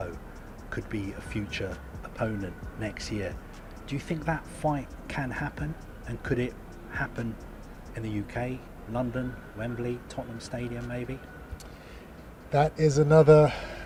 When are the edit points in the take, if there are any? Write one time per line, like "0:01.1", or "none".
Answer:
none